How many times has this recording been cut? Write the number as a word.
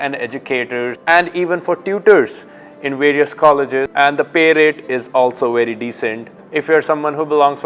three